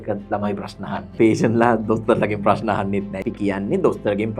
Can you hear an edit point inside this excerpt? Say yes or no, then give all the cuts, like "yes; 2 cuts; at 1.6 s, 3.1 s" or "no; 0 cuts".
yes; 2 cuts; at 1.1 s, 3.1 s